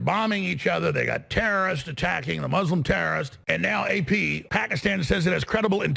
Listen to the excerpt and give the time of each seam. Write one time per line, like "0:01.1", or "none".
0:03.4
0:04.4